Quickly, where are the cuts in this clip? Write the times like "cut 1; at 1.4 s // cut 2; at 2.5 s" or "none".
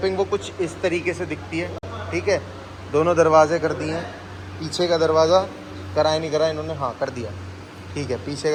none